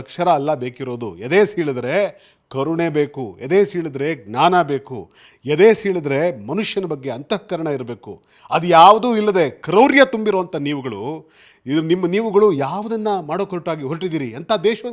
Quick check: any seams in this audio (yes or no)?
no